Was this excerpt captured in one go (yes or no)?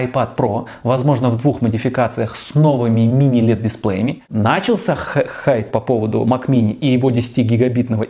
no